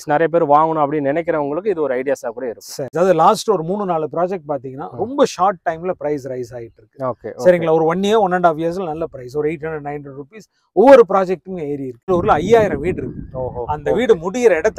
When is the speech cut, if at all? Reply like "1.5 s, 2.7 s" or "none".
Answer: 2.9 s, 12.1 s

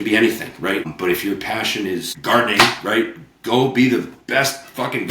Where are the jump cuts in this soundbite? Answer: 0.9 s, 2.1 s

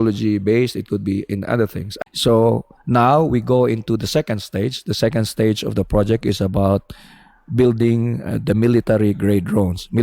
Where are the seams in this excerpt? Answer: 1.8 s

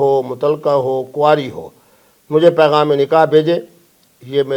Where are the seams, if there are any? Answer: none

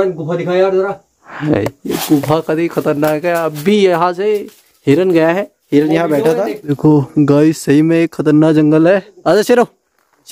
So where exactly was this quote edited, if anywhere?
6.8 s

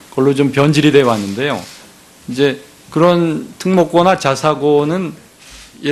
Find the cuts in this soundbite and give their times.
1.0 s

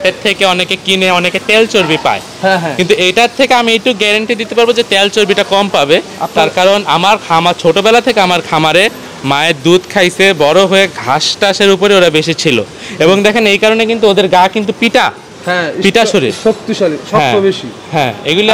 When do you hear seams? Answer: none

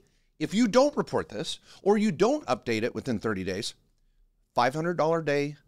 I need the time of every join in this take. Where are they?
none

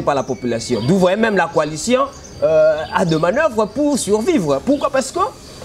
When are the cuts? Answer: none

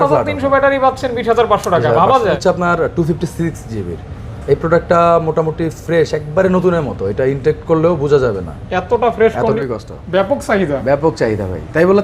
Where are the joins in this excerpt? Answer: 2.4 s, 9.6 s

